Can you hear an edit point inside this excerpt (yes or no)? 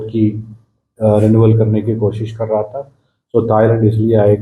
no